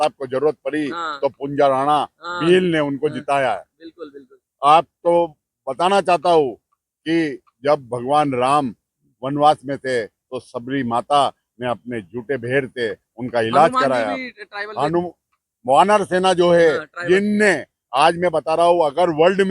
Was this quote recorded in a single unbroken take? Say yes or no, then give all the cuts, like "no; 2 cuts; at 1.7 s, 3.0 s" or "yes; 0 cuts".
yes; 0 cuts